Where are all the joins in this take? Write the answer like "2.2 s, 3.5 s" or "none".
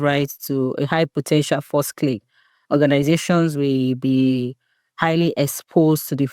none